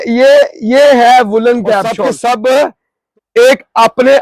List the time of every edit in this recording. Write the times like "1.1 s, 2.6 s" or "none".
2.1 s